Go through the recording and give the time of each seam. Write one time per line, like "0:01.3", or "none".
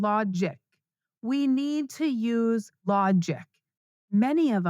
0:02.7